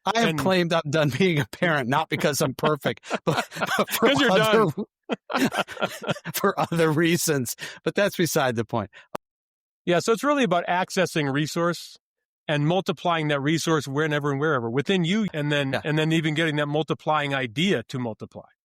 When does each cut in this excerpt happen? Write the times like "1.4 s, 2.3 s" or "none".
15.3 s